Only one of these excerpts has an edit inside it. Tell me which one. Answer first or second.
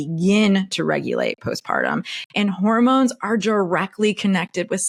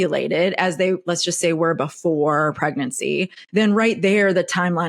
second